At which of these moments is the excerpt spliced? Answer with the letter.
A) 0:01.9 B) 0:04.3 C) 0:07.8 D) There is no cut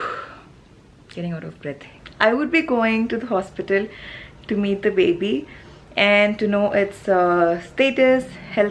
A